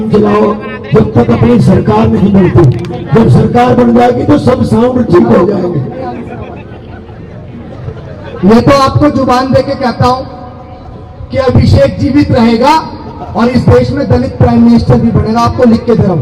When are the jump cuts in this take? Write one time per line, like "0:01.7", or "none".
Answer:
none